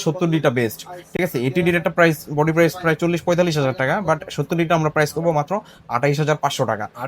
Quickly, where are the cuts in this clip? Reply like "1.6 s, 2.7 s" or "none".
none